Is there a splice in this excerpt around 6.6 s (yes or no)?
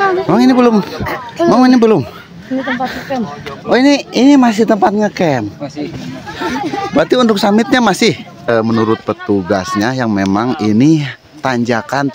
no